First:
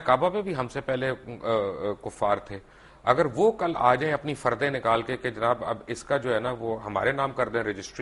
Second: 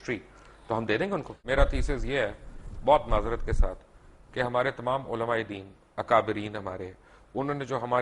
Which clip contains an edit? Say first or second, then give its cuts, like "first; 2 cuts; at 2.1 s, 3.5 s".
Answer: second; 1 cut; at 1.4 s